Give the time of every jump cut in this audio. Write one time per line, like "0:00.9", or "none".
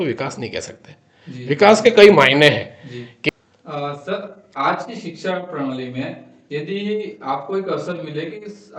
0:03.2